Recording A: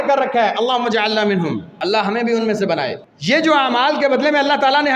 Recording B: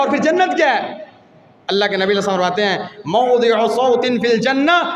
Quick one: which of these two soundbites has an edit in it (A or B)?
A